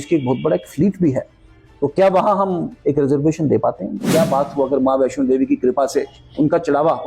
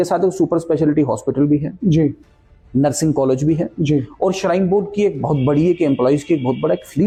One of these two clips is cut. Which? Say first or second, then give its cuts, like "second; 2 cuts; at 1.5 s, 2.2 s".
first; 1 cut; at 4.1 s